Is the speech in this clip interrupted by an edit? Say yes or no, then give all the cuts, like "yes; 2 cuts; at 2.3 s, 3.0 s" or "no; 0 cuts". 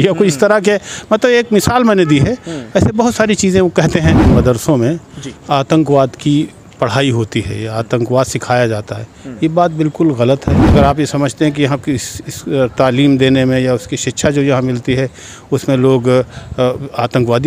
yes; 2 cuts; at 4.2 s, 10.6 s